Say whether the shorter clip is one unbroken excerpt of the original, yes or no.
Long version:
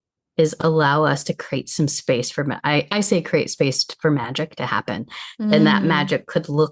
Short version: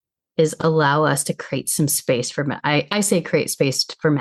yes